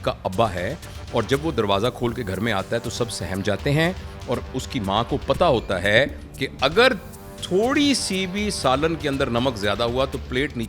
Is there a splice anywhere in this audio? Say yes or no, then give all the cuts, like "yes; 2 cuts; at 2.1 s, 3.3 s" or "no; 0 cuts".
no; 0 cuts